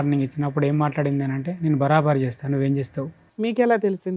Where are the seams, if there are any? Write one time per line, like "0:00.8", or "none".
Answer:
0:03.2